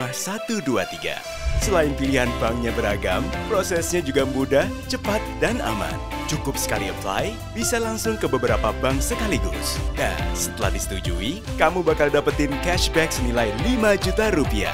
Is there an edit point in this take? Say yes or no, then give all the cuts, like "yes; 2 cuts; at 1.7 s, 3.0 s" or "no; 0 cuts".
no; 0 cuts